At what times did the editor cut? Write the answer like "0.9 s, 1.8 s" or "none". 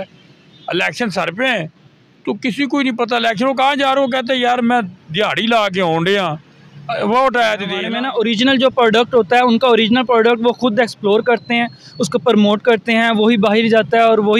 7.9 s